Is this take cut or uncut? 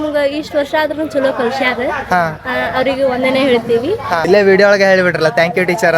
cut